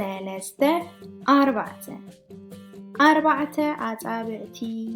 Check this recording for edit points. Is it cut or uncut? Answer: uncut